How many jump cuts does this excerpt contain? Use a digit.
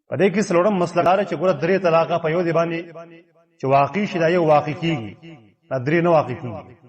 1